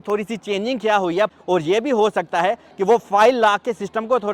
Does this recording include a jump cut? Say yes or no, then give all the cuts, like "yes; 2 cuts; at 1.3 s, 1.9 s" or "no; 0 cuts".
yes; 1 cut; at 1.3 s